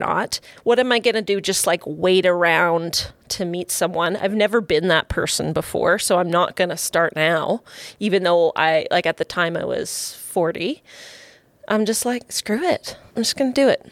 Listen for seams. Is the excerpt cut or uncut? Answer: cut